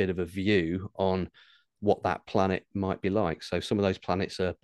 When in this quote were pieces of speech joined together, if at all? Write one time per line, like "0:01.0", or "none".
none

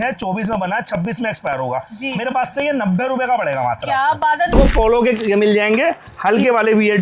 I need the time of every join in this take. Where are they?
0:04.5

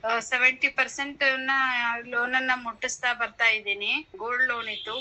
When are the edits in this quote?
none

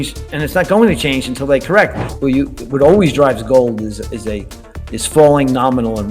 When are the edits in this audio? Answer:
0:02.0

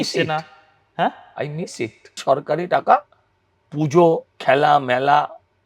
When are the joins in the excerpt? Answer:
0:02.2
0:04.3

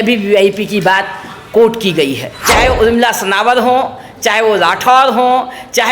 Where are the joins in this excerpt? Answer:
0:02.3

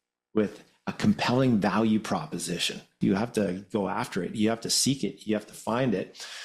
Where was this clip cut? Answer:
0:02.9

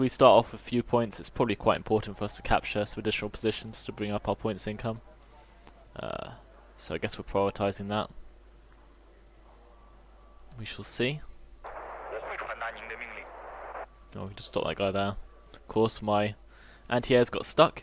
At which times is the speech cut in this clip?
0:07.3

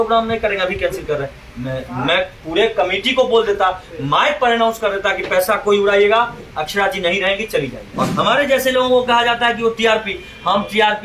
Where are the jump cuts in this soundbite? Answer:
0:07.8

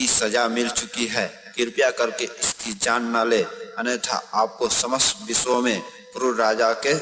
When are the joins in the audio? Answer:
none

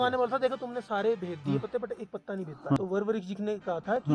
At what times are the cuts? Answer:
0:02.8

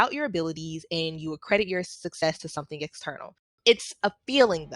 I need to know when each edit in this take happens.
0:03.6

